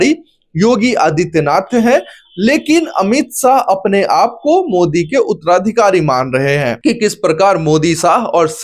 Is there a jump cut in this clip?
yes; 1 cut; at 6.7 s

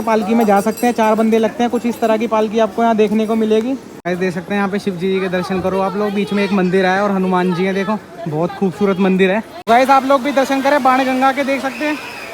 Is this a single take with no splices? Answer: no; 2 cuts; at 3.9 s, 9.5 s

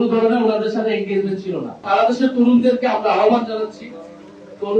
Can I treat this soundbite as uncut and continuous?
no; 1 cut; at 1.8 s

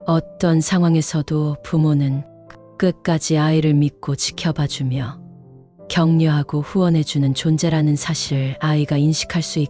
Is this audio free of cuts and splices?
yes; 0 cuts

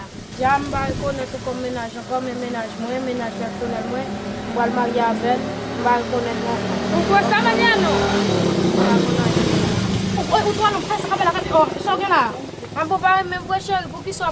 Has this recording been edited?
no; 0 cuts

